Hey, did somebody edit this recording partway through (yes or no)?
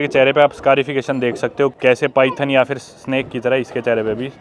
no